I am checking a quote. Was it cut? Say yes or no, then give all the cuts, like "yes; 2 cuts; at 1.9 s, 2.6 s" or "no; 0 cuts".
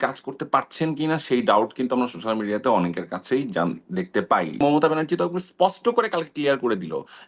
yes; 1 cut; at 4.6 s